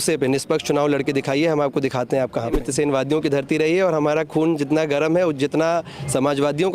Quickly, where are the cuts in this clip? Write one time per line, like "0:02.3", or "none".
0:02.6